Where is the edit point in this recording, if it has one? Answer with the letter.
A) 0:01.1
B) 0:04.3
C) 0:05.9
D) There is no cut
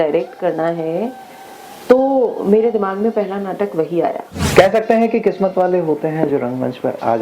B